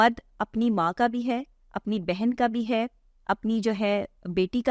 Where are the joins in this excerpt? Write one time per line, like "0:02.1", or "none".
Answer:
none